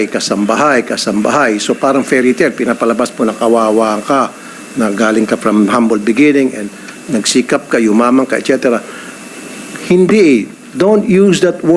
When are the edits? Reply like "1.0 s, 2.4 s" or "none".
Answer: none